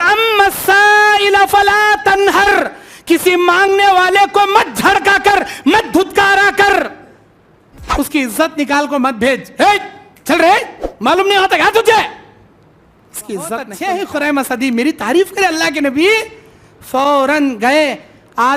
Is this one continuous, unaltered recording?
no; 1 cut; at 13.7 s

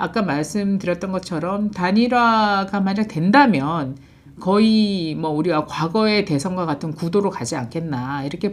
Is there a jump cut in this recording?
no; 0 cuts

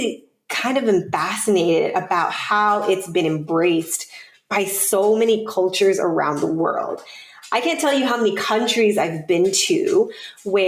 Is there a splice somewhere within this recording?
no; 0 cuts

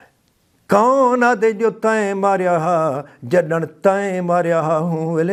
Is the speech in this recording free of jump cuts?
yes; 0 cuts

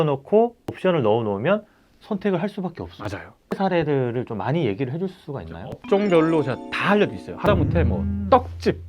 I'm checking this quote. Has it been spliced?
yes; 1 cut; at 3.5 s

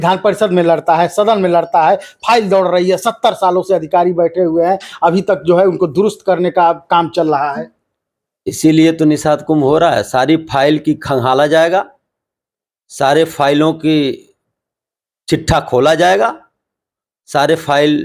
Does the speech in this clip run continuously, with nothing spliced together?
yes; 0 cuts

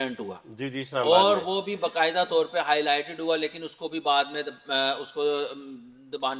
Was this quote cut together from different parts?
no; 0 cuts

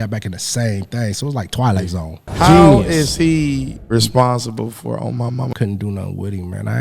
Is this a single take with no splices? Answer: no; 3 cuts; at 2.3 s, 3.8 s, 5.5 s

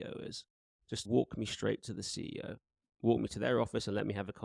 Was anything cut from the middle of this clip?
yes; 1 cut; at 1.0 s

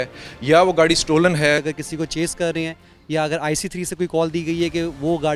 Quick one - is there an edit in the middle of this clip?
yes; 1 cut; at 1.6 s

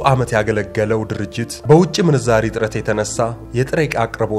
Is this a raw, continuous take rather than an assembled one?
no; 2 cuts; at 1.5 s, 3.4 s

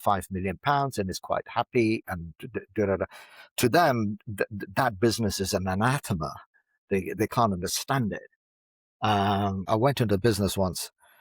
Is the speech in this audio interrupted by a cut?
yes; 1 cut; at 9.7 s

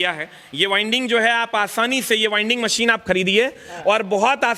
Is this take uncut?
yes; 0 cuts

